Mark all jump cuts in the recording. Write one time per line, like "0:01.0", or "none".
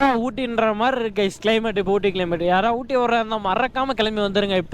none